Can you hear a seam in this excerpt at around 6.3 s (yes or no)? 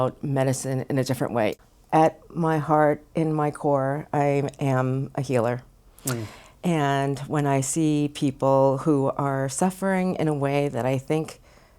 no